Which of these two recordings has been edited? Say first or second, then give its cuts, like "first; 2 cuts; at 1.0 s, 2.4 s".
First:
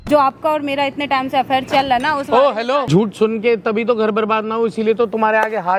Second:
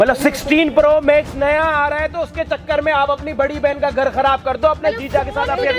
first; 1 cut; at 2.9 s